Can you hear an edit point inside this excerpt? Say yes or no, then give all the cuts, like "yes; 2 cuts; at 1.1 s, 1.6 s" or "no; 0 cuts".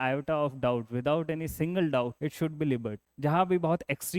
yes; 2 cuts; at 2.2 s, 3.0 s